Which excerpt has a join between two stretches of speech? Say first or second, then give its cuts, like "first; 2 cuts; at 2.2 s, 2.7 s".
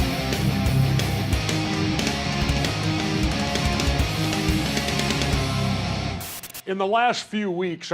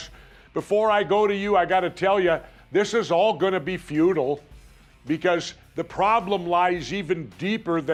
first; 1 cut; at 2.2 s